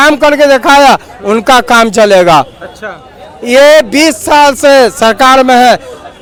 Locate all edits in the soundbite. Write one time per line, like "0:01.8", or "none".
none

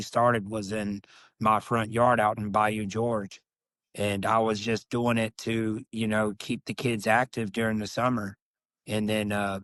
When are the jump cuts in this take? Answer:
none

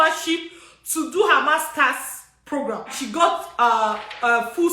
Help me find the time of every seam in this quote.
0:02.9

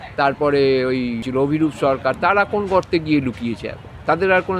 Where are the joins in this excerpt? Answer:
0:01.3

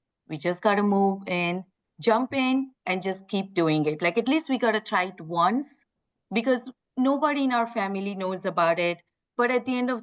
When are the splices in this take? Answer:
none

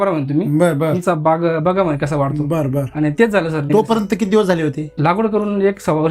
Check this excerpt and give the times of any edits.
0:03.6
0:04.9

